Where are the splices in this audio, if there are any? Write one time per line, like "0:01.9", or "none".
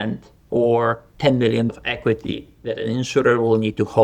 0:01.7